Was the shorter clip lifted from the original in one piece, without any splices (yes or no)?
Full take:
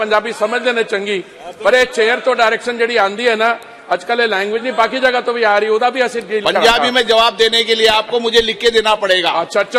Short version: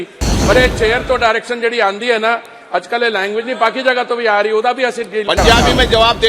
yes